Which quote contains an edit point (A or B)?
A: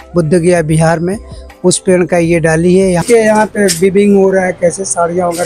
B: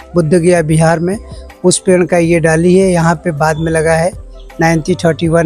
A